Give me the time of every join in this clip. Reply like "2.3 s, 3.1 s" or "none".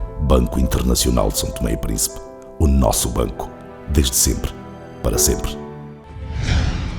6.0 s